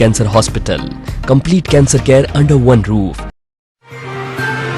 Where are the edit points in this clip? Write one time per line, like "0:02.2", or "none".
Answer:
0:03.4